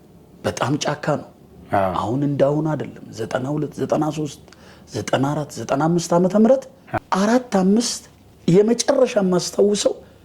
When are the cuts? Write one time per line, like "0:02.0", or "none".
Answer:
0:06.8

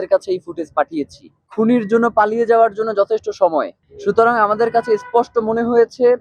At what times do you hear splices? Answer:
0:01.4

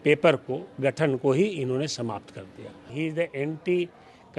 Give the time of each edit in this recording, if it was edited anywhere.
0:02.9

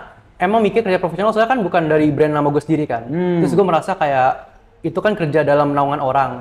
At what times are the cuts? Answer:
none

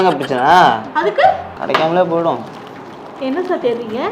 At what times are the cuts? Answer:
0:01.5

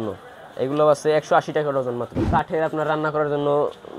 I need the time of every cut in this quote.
0:02.1

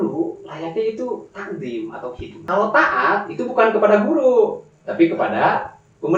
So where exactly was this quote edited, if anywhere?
0:02.4

